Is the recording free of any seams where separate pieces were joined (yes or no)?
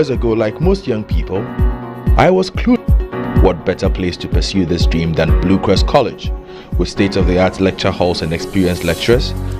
no